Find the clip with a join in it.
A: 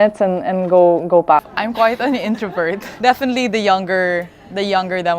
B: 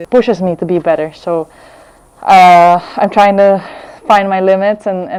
A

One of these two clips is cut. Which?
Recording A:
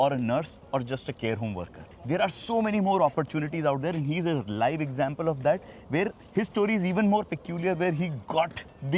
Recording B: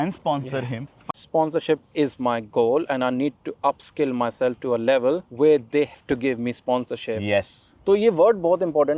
B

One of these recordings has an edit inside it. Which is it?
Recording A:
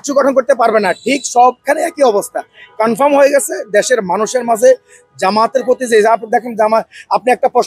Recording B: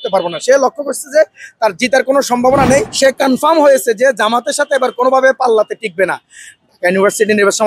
B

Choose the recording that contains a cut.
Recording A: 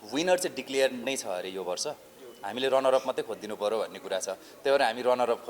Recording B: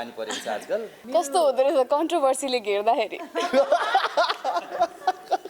B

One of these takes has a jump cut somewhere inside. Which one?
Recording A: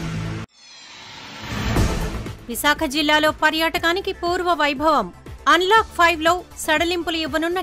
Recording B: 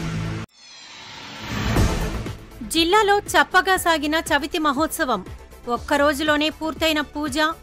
B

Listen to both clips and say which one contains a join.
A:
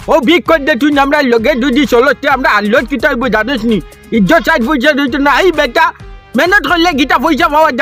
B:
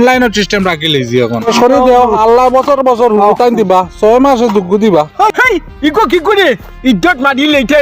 B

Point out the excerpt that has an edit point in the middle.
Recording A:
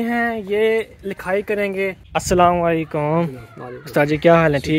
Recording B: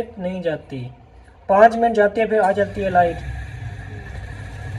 A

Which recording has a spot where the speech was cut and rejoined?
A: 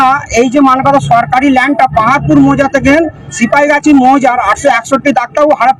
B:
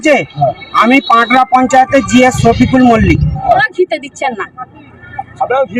B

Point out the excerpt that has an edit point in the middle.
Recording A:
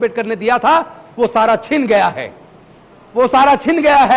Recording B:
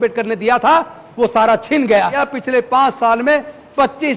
B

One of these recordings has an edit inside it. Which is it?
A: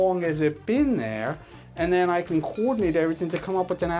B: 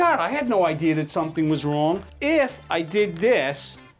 B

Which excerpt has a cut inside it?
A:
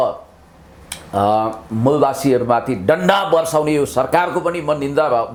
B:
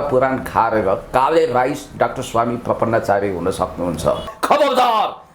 B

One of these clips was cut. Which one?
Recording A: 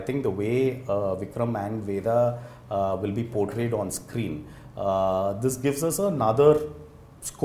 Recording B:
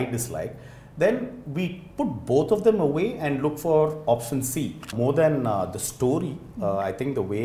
B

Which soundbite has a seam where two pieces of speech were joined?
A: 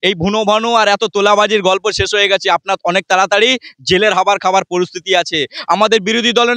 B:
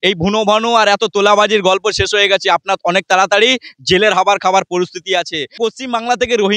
B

